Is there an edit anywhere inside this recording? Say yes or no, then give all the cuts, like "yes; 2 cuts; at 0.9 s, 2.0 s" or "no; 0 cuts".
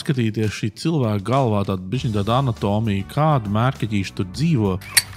no; 0 cuts